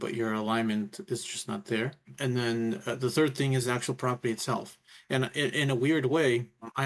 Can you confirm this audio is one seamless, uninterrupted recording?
no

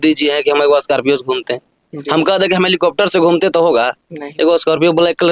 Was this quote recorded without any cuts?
yes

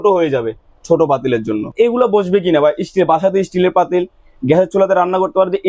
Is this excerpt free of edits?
no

